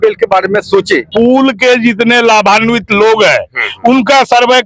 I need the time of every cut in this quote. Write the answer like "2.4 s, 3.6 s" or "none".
1.0 s